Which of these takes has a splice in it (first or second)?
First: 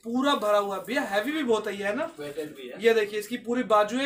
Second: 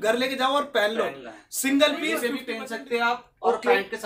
second